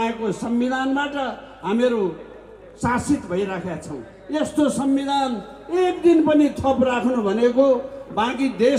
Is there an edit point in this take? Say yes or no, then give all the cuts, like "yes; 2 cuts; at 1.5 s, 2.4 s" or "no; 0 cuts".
no; 0 cuts